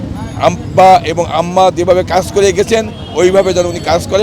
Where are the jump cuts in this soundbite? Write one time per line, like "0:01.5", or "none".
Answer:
none